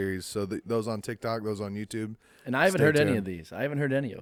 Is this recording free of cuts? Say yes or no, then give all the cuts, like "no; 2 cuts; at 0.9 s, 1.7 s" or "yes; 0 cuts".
yes; 0 cuts